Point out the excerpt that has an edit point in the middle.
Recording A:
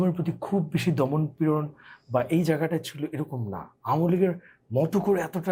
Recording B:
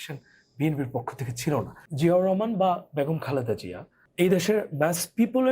B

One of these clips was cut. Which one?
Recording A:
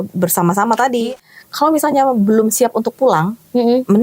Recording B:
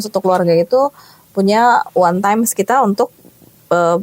A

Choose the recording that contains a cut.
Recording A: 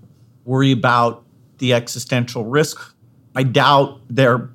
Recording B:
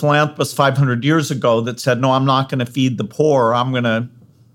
A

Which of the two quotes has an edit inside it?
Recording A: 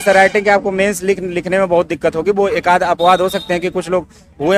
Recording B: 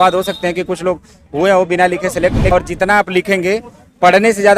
B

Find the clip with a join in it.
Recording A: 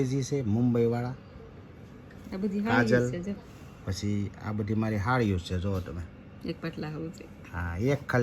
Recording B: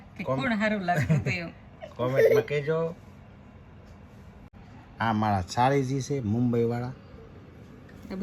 B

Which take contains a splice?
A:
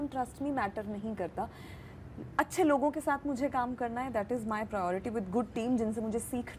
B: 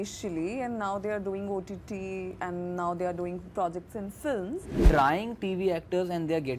B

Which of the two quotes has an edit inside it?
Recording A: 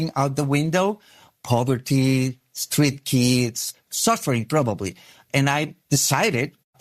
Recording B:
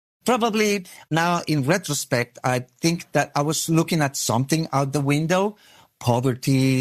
A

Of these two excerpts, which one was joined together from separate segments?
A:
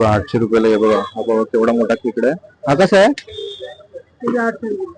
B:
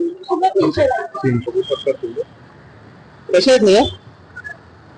B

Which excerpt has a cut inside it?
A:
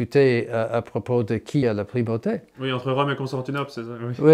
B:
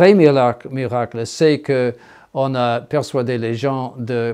A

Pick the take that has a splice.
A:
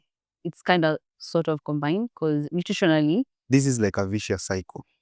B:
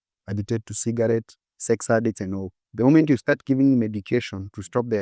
A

